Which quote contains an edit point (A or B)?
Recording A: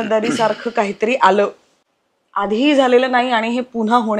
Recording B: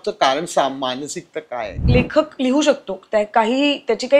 B